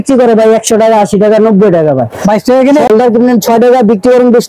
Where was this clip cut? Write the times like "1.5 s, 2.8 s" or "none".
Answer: 2.9 s

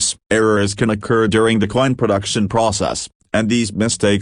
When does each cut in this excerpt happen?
none

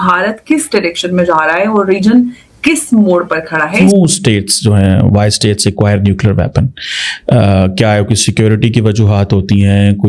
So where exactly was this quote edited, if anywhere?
3.7 s

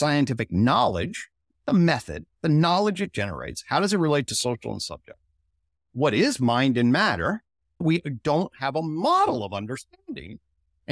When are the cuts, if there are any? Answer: 7.8 s

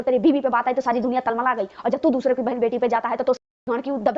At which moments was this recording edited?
none

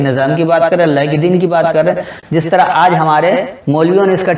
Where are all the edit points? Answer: 2.1 s

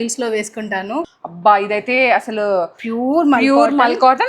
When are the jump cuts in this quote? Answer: 1.1 s

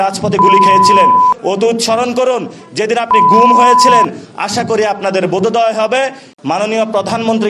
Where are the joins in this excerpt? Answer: 6.3 s

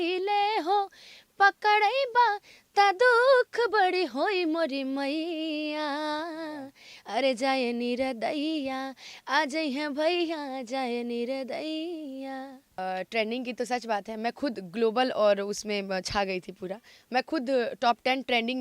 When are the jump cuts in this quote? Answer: 12.8 s

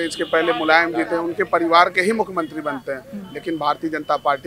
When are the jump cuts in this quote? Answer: none

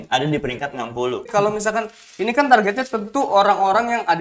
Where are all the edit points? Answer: 1.3 s

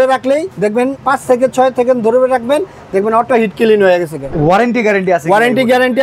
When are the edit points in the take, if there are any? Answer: 0.8 s, 4.2 s

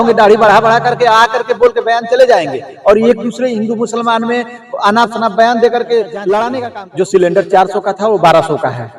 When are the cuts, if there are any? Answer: 6.6 s

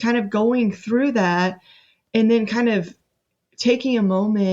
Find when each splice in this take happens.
none

